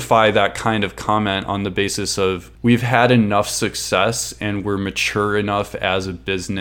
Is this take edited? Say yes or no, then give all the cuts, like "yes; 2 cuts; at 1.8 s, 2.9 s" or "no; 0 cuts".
yes; 1 cut; at 2.5 s